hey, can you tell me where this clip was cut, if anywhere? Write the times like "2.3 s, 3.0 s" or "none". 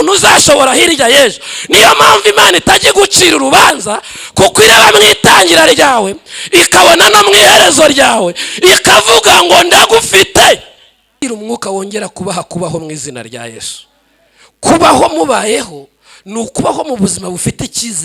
11.2 s